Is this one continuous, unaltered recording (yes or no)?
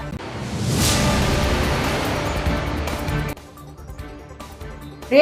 yes